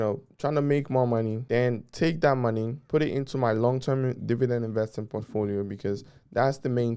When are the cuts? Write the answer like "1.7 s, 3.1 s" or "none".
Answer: 1.4 s, 2.8 s